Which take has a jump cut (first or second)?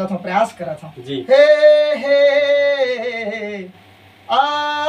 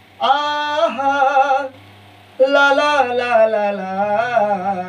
first